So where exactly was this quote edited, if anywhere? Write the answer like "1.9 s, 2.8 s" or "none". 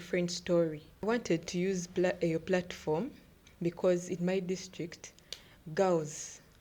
1.0 s